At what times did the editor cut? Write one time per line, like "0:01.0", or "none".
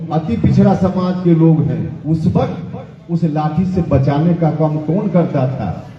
0:01.9